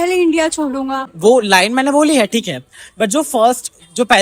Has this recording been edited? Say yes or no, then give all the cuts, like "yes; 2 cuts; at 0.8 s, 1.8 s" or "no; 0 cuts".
yes; 1 cut; at 1.1 s